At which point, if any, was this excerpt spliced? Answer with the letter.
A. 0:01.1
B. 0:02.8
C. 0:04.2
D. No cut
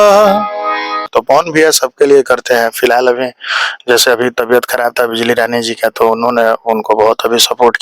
A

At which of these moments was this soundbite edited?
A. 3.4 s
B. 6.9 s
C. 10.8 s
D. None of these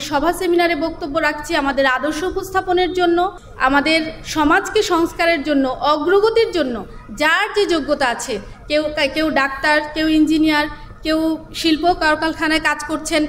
A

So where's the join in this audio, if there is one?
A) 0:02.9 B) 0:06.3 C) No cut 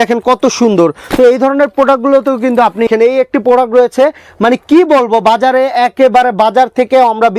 A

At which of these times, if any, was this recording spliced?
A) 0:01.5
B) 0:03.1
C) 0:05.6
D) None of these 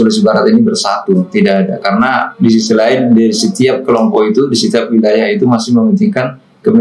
D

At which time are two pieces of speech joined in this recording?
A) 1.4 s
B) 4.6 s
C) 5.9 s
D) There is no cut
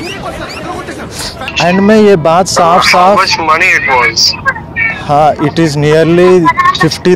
A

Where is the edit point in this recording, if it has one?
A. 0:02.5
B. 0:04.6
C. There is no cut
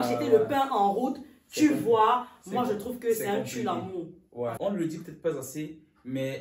B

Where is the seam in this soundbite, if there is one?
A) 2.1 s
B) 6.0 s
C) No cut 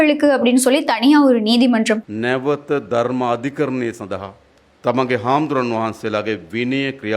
A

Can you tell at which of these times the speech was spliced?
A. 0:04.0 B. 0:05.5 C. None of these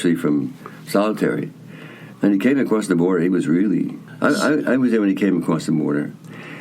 A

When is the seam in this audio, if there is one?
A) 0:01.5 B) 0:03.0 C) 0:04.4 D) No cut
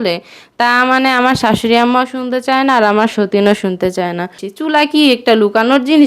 C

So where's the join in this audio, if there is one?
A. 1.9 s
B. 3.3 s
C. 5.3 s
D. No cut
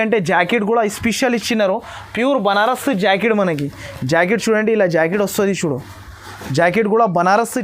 D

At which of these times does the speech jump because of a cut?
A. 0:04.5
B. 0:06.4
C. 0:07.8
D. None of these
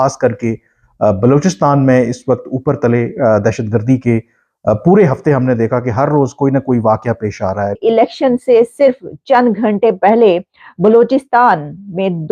C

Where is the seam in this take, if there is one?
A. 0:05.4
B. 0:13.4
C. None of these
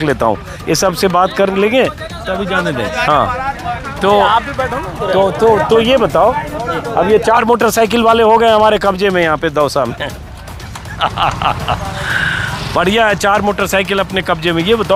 C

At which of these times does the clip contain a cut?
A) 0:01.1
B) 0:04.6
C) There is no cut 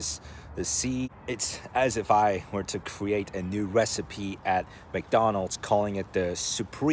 A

